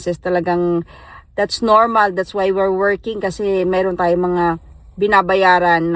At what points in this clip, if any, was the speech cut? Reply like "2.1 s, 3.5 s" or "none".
none

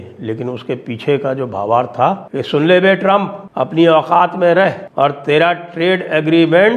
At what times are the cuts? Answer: 2.3 s, 3.4 s, 4.8 s

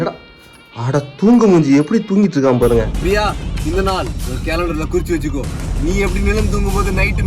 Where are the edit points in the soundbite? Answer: 2.9 s

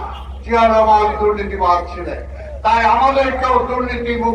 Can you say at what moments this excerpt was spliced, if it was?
none

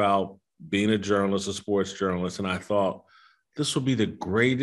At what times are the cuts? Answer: none

